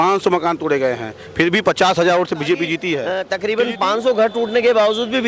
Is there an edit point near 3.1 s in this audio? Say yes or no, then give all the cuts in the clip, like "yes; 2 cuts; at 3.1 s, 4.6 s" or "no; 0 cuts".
yes; 1 cut; at 3.1 s